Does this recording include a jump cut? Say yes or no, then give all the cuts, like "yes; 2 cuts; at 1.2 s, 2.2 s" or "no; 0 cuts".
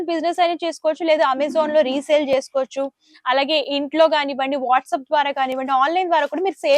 no; 0 cuts